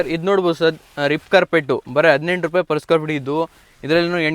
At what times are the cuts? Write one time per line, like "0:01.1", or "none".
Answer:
none